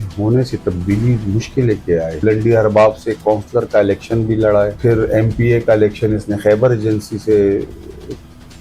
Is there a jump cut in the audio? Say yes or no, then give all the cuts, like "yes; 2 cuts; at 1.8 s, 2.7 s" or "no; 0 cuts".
yes; 2 cuts; at 2.2 s, 4.8 s